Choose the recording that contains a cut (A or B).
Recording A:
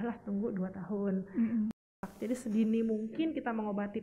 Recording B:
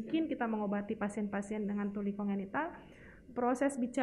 A